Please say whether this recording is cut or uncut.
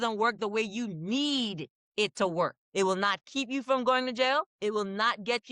cut